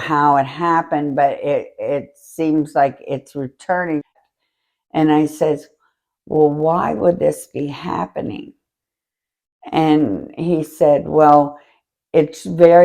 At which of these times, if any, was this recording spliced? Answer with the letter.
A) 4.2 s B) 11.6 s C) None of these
A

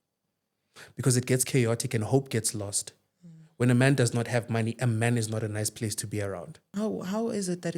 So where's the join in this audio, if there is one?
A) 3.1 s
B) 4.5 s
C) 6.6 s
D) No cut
C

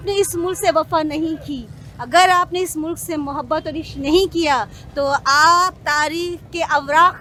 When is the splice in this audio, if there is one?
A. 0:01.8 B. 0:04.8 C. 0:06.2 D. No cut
D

